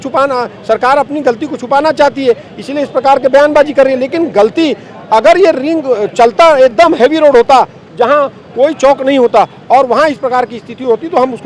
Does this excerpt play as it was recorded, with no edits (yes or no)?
yes